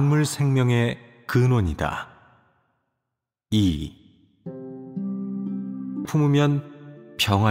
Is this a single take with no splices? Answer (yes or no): yes